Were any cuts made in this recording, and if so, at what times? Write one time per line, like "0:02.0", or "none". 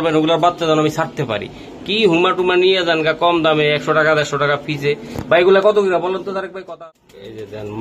0:06.5